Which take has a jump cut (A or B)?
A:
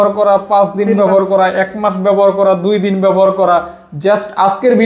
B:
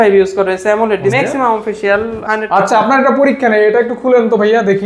B